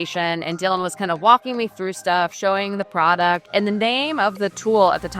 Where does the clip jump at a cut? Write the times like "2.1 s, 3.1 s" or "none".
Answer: 3.4 s